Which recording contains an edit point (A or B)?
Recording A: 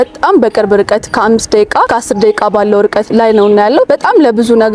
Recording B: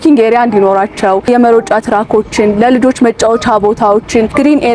A